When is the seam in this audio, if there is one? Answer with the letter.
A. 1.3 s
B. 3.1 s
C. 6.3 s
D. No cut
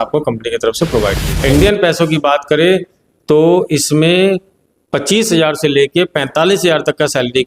A